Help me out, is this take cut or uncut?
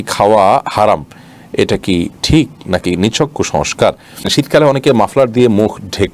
cut